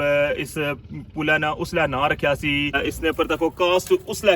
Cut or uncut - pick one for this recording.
cut